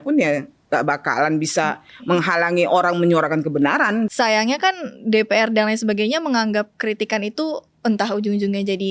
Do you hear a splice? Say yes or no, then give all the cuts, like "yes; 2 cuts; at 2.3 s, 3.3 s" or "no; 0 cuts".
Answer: yes; 1 cut; at 4.1 s